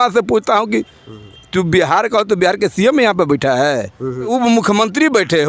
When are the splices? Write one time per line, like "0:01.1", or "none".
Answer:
0:04.3